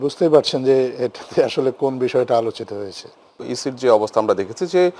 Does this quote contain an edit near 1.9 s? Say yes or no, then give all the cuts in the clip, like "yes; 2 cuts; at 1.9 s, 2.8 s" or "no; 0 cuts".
no; 1 cut; at 3.5 s